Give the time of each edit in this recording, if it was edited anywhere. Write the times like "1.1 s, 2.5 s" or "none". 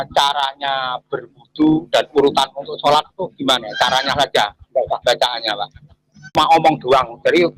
6.3 s